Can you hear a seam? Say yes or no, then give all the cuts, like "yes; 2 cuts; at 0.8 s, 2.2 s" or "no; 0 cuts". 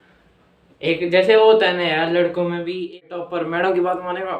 yes; 1 cut; at 3.0 s